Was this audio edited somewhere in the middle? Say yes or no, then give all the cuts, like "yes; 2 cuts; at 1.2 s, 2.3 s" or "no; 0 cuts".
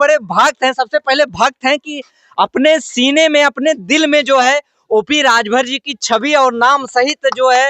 no; 0 cuts